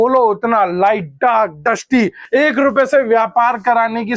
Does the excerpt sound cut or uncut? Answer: cut